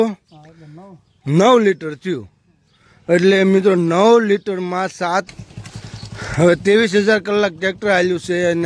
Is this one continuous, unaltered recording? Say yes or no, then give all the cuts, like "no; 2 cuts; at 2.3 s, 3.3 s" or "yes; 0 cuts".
no; 1 cut; at 5.3 s